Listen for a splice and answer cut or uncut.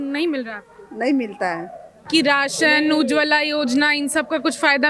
cut